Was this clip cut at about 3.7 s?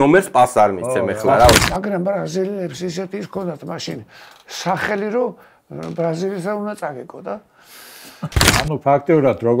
no; 2 cuts; at 1.7 s, 8.4 s

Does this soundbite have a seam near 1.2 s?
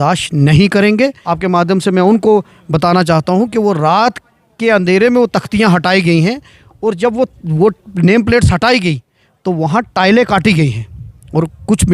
yes; 1 cut; at 1.2 s

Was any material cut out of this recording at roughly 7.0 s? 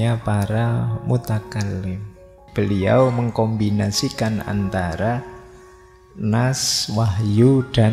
no; 1 cut; at 2.4 s

